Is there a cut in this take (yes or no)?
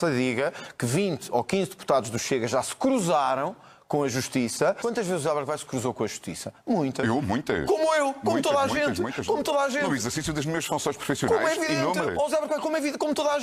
no